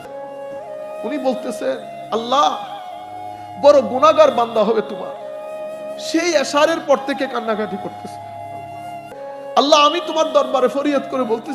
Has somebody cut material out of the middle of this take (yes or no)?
yes